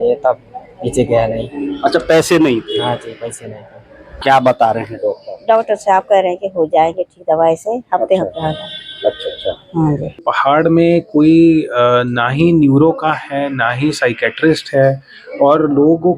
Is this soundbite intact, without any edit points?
no; 2 cuts; at 4.1 s, 10.2 s

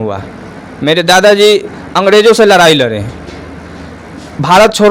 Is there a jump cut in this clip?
no; 0 cuts

